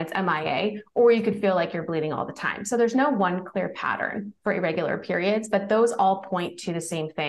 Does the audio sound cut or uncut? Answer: uncut